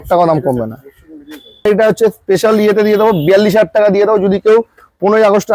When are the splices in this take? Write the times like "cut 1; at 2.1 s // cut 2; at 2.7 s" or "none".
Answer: cut 1; at 1.6 s